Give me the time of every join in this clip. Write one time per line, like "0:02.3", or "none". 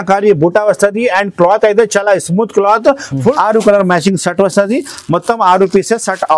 0:03.3